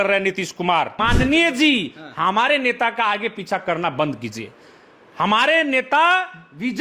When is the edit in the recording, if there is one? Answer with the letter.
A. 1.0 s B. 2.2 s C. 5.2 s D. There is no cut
A